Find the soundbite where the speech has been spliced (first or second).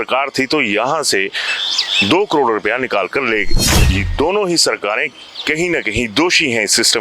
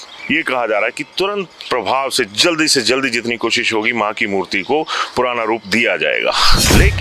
first